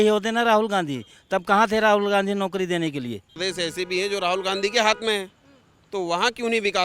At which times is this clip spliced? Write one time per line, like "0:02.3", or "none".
0:03.4